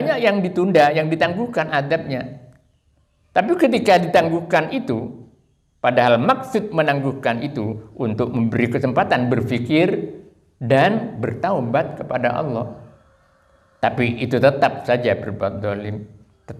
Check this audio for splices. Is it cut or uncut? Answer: uncut